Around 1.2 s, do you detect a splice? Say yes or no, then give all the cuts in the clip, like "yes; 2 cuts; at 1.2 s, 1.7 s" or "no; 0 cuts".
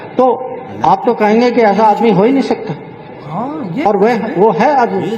no; 0 cuts